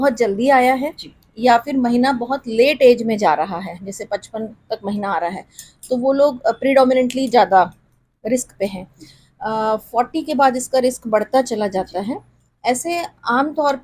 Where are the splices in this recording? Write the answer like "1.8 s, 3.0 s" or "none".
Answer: none